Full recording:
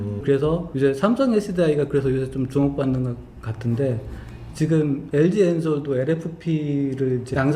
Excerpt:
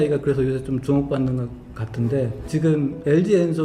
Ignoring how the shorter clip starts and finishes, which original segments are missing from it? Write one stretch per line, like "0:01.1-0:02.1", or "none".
0:04.1-0:04.5